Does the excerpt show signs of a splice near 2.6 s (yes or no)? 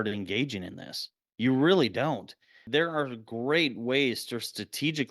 yes